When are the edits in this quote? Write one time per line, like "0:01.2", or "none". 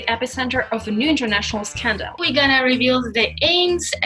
0:02.2